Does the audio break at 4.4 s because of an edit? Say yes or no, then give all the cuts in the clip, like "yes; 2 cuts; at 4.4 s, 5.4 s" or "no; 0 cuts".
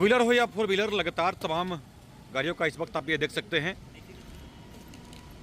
no; 0 cuts